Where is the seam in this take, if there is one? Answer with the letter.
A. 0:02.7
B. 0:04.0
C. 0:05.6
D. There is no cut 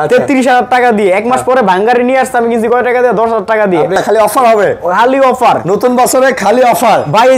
B